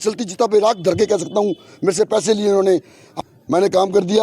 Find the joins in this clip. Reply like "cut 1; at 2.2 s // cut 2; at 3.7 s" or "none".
cut 1; at 3.2 s